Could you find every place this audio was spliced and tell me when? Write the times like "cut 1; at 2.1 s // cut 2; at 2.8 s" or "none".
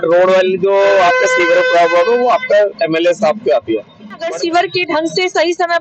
cut 1; at 4.3 s

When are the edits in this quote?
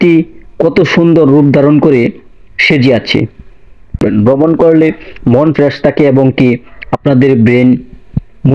cut 1; at 4.0 s

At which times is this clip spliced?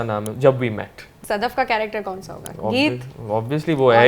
cut 1; at 1.2 s

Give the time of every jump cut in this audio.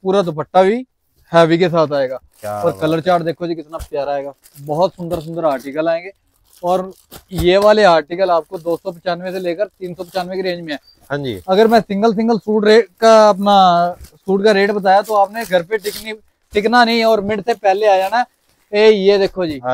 none

